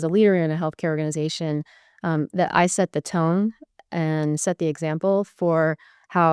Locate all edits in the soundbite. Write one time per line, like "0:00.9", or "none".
none